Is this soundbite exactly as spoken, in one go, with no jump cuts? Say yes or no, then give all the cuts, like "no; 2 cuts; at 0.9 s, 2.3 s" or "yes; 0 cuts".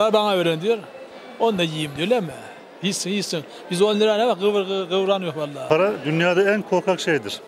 no; 1 cut; at 5.6 s